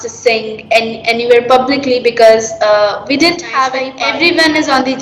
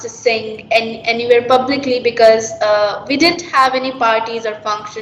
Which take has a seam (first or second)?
first